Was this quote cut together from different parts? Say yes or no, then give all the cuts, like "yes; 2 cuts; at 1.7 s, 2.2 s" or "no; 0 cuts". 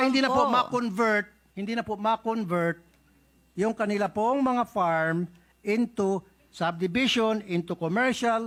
no; 0 cuts